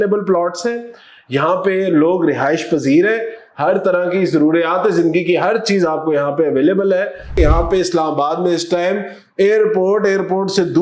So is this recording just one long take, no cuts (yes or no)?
no